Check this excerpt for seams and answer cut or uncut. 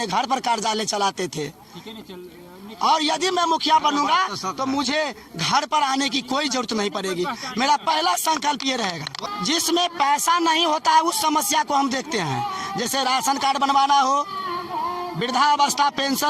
cut